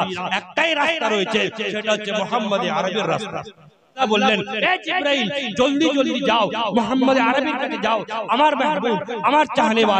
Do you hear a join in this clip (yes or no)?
yes